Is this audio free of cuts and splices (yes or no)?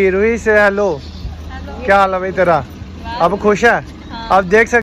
yes